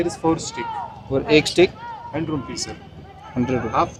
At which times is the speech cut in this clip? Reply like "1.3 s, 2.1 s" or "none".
none